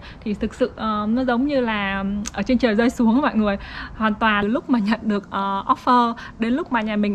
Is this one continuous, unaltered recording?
no; 1 cut; at 4.4 s

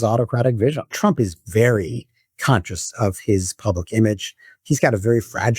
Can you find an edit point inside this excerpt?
yes; 1 cut; at 0.9 s

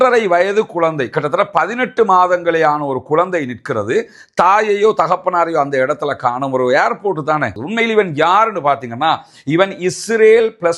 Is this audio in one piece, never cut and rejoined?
no; 1 cut; at 7.6 s

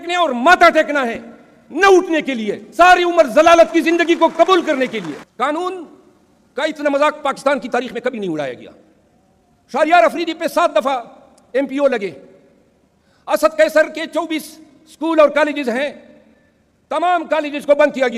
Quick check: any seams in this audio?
no; 0 cuts

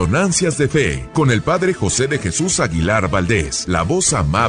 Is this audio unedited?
no; 2 cuts; at 1.0 s, 3.6 s

